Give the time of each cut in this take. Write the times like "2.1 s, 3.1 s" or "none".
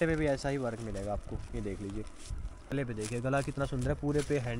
2.7 s